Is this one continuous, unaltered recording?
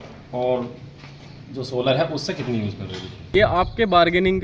no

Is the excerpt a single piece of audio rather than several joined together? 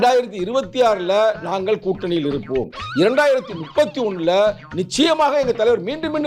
yes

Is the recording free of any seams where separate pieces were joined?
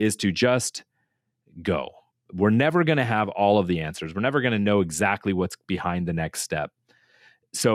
yes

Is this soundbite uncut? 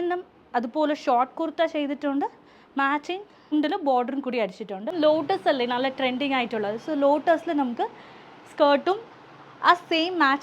no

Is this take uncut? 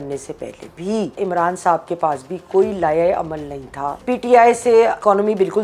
no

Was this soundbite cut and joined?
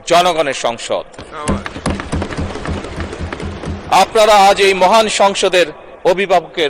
no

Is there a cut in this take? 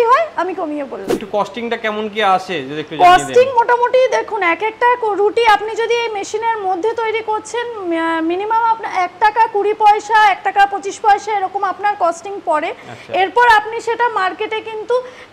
yes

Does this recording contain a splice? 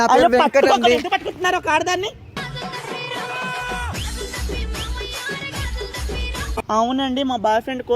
yes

